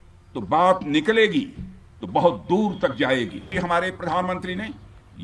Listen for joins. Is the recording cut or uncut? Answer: cut